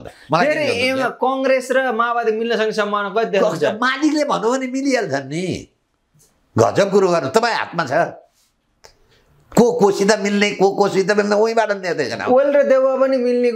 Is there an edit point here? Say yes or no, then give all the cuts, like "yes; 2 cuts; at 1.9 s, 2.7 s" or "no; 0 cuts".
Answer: no; 0 cuts